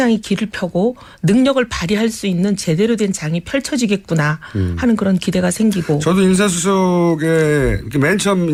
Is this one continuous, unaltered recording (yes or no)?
yes